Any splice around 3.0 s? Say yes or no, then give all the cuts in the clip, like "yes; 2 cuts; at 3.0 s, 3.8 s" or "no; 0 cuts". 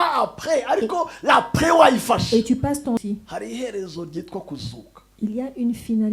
yes; 1 cut; at 3.0 s